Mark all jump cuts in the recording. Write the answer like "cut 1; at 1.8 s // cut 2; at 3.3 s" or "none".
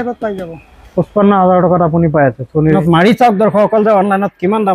cut 1; at 2.7 s